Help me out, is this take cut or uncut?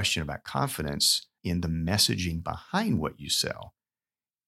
cut